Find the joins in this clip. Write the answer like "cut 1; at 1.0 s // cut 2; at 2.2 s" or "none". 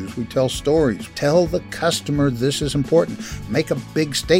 cut 1; at 1.1 s // cut 2; at 3.5 s